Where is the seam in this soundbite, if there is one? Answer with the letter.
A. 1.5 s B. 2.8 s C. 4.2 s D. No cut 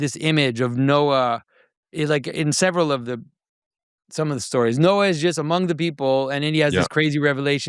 D